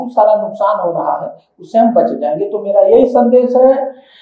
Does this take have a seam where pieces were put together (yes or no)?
no